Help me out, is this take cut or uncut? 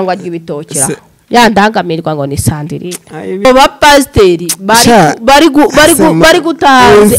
cut